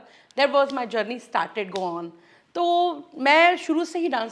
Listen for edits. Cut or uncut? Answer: uncut